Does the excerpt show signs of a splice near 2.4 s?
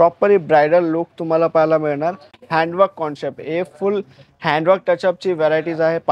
yes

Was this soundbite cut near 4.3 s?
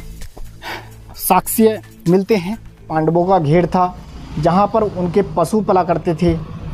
no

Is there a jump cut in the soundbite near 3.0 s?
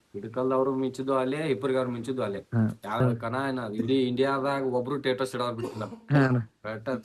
yes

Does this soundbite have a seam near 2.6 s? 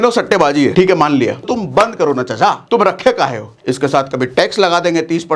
yes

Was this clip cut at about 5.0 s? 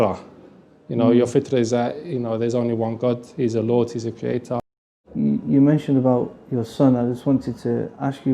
yes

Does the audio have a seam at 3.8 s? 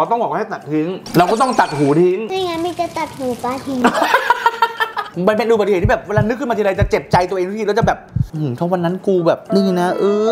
yes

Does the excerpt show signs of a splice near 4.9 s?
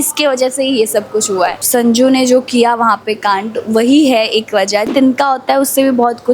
yes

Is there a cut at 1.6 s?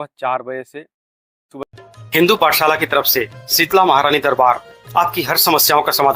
yes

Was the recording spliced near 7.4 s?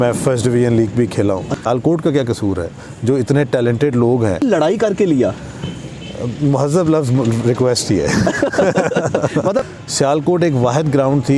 no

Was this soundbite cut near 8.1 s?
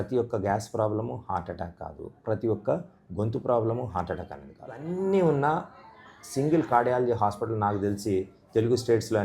no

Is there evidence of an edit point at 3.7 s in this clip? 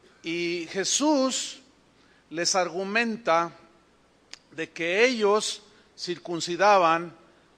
no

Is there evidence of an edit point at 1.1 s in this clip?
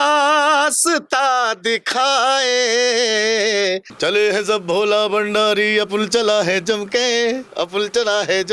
no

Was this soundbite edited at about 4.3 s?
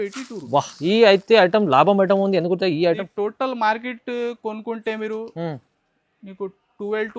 no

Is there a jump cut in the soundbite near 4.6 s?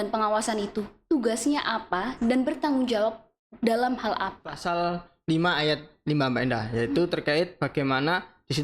yes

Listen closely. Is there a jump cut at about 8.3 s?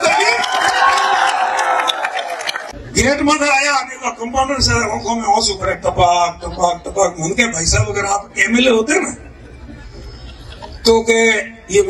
no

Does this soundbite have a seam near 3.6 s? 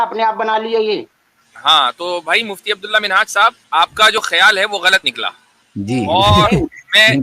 yes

